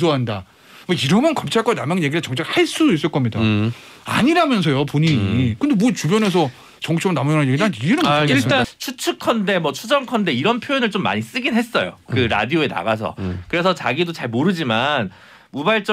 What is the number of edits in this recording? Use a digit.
1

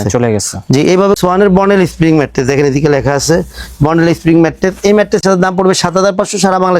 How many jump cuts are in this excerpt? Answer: 2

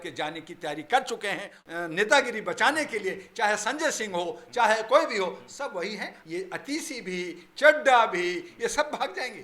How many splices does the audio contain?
2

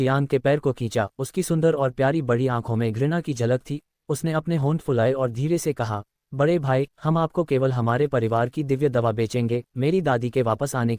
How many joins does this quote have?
0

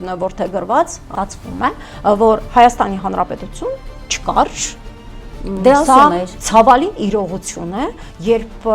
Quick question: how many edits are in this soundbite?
1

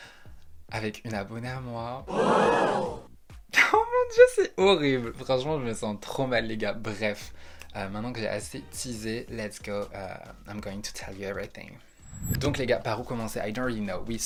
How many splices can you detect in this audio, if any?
0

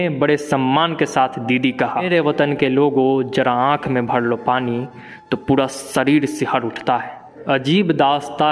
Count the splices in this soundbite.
2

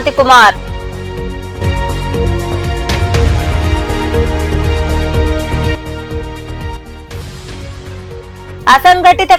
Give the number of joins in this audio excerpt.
0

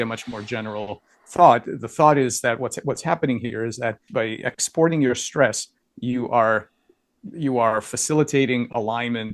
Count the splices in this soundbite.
1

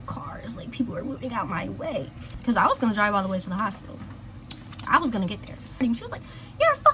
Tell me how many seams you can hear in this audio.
2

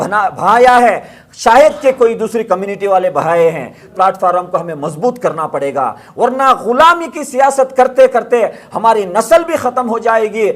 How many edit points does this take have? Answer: 1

